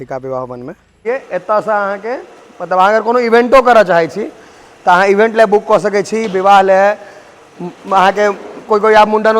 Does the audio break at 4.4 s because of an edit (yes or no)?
no